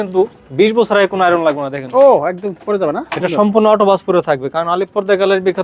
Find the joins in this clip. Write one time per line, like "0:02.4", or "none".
none

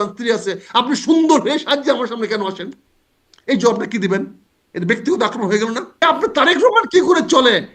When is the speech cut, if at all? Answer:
0:06.0

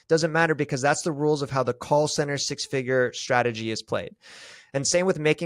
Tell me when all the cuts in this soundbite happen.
none

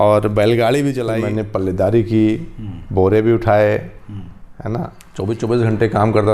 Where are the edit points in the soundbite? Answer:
0:01.1
0:05.0

